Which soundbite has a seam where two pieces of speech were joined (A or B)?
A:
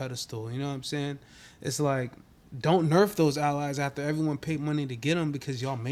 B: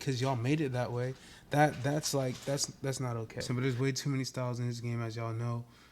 B